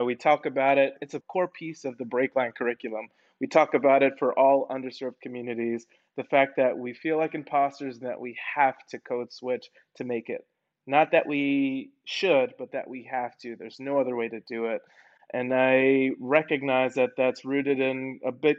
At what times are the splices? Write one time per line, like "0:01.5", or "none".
0:01.1